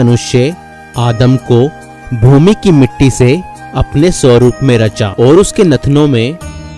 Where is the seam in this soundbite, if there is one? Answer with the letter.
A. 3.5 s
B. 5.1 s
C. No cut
B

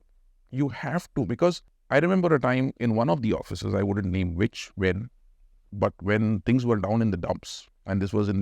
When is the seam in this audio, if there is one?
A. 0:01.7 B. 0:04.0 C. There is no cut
A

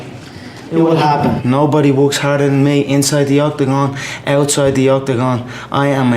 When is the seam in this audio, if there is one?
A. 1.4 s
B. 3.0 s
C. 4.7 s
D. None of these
A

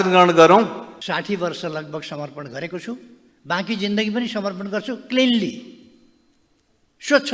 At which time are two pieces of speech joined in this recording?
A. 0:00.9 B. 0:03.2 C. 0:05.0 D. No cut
A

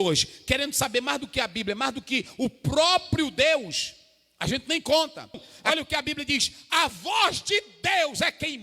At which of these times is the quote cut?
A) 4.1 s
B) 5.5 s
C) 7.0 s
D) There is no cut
B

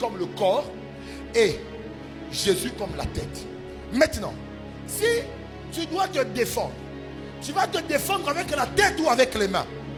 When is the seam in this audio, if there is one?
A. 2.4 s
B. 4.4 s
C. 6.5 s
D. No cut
D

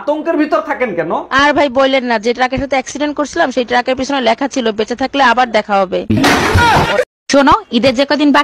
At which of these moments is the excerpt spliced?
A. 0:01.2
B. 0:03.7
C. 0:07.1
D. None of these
D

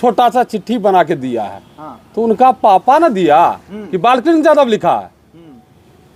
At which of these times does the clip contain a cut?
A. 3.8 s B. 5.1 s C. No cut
C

